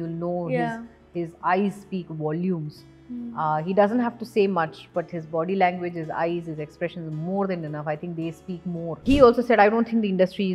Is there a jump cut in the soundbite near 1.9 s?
no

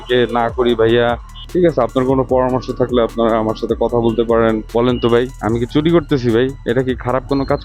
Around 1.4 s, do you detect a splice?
yes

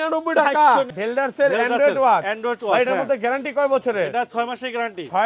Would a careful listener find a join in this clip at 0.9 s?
yes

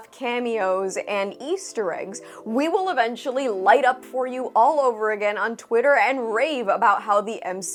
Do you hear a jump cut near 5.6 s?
no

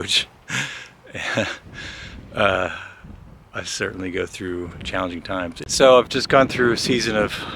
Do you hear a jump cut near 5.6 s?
yes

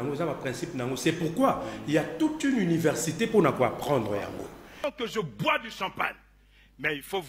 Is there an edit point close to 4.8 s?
yes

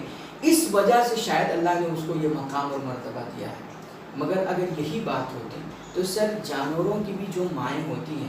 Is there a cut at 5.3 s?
no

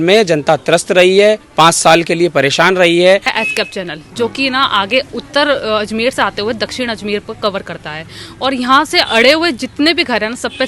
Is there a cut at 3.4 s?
yes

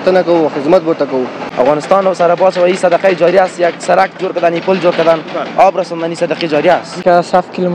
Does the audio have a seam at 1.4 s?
yes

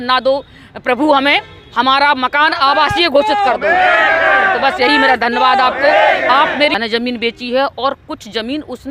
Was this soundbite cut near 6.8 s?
yes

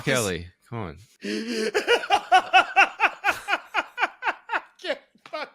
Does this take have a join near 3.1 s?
no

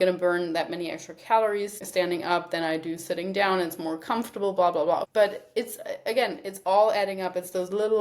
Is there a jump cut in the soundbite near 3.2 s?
no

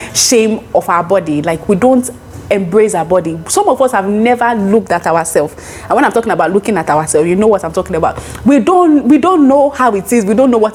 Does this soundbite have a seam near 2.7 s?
no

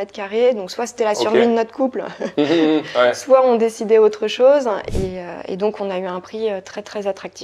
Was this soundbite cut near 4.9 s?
yes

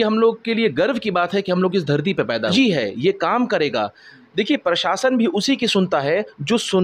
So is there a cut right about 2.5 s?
yes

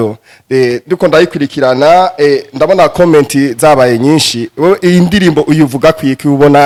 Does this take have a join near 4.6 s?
no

